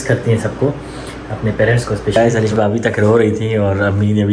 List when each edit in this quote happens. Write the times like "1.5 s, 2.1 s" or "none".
2.2 s